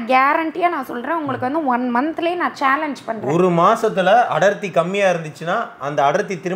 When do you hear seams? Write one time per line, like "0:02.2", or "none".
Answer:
none